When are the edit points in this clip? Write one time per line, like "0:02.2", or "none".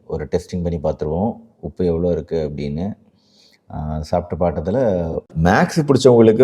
0:05.3